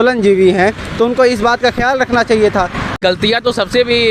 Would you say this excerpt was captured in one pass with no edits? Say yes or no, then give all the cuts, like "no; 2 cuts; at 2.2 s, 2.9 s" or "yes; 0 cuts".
no; 1 cut; at 3.0 s